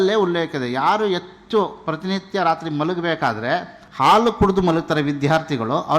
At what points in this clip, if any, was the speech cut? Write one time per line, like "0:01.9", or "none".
none

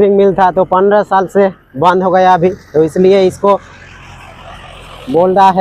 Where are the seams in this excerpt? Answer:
none

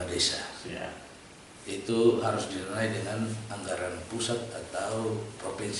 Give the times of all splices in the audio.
none

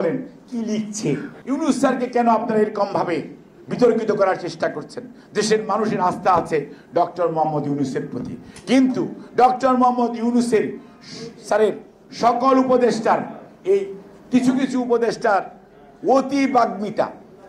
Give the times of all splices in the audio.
0:01.3

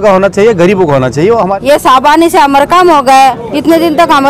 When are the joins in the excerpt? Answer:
0:01.5

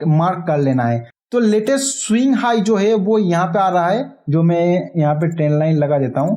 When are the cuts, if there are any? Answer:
none

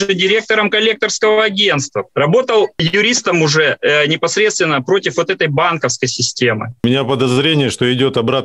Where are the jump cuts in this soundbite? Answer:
0:02.1
0:02.7
0:06.8

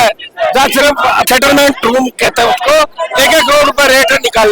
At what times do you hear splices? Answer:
0:01.3
0:03.0

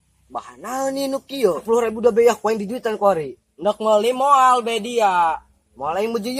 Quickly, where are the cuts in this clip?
0:01.6

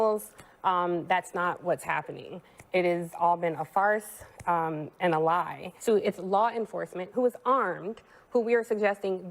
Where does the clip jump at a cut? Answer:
0:05.6

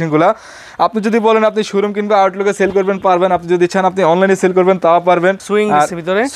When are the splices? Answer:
0:05.4

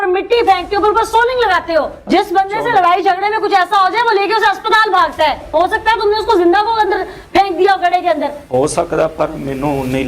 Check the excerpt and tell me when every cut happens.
0:05.4

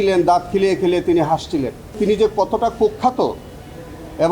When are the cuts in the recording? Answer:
0:02.0

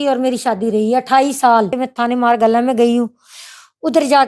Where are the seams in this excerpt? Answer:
0:01.8

